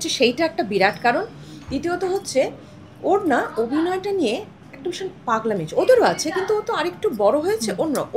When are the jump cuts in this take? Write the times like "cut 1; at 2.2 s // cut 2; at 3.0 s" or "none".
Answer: none